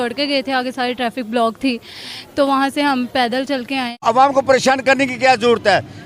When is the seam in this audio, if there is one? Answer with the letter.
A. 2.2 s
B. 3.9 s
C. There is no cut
B